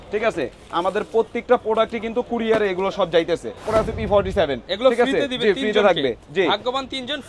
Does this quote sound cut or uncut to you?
cut